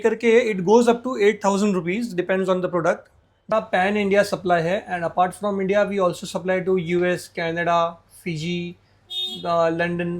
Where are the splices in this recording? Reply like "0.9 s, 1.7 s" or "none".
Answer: 3.5 s